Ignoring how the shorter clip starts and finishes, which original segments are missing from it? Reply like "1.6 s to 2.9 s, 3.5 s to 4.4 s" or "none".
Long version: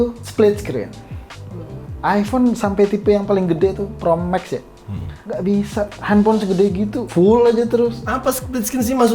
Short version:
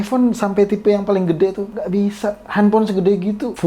3.9 s to 5.2 s